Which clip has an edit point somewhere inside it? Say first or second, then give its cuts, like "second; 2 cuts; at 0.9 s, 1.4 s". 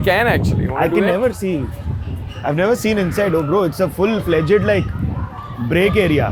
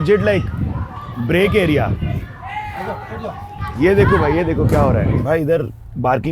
second; 1 cut; at 5.2 s